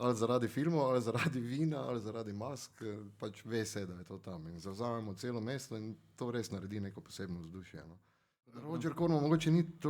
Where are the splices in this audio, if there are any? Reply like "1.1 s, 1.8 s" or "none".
8.7 s